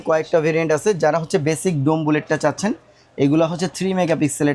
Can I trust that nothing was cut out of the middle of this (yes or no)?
yes